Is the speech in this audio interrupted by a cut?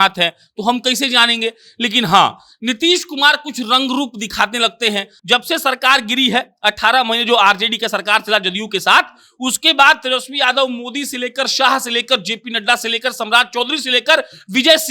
yes; 1 cut; at 5.1 s

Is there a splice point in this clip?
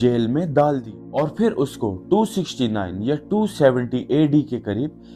no; 0 cuts

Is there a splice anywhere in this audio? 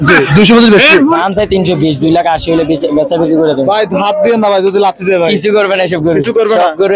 yes; 1 cut; at 1.1 s

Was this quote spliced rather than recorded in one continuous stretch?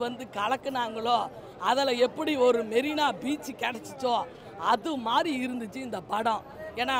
no; 0 cuts

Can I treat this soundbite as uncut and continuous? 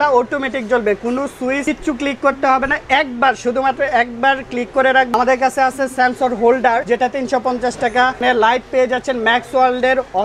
no; 4 cuts; at 1.6 s, 5.1 s, 6.8 s, 8.2 s

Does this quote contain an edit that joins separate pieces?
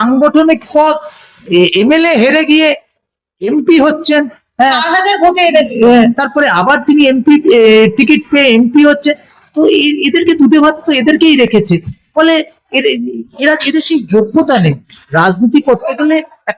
no; 0 cuts

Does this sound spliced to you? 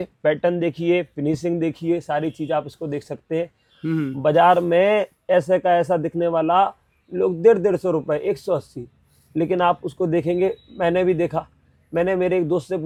no; 0 cuts

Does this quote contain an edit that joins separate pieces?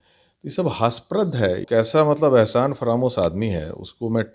yes; 1 cut; at 1.6 s

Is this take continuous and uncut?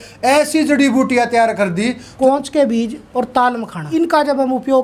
no; 3 cuts; at 2.1 s, 3.0 s, 3.8 s

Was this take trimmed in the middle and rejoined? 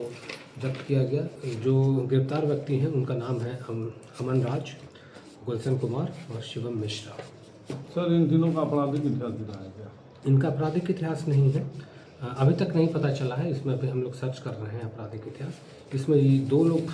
yes; 1 cut; at 1.4 s

